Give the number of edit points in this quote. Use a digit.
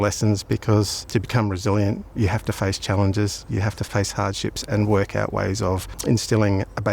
4